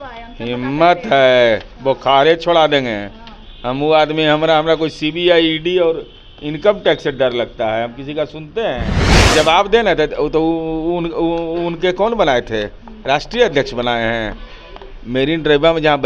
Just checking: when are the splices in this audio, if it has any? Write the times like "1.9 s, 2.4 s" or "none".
9.2 s